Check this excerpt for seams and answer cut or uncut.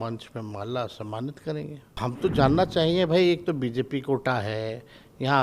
cut